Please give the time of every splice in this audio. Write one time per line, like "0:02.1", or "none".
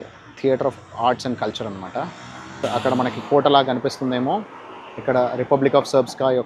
0:02.6